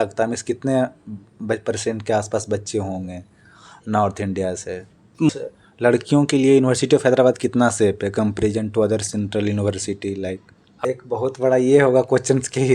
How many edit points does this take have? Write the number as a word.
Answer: two